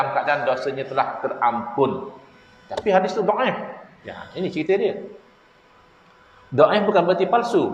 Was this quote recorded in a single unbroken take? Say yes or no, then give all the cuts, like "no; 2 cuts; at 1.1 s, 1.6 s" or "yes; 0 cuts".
yes; 0 cuts